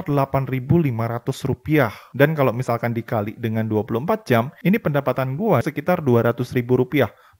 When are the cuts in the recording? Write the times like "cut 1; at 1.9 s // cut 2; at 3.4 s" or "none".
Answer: cut 1; at 5.6 s